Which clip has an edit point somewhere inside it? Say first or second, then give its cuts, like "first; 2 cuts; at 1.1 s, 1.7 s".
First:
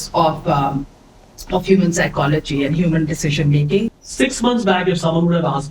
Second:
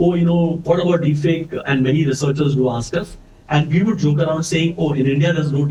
first; 1 cut; at 4.0 s